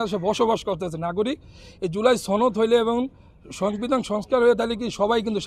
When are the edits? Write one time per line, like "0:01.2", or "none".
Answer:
none